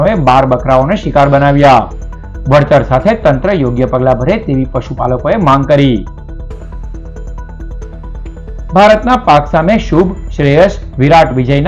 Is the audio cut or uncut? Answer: uncut